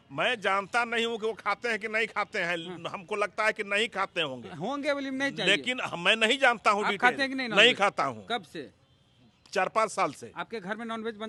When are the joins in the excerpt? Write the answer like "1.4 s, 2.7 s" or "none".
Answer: none